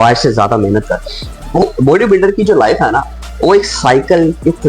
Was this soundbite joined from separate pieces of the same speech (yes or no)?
yes